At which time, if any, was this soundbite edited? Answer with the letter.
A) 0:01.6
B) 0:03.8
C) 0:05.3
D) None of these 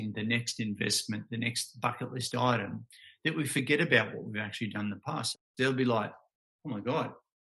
C